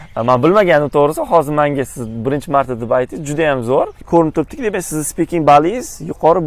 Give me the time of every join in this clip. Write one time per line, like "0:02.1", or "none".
0:04.0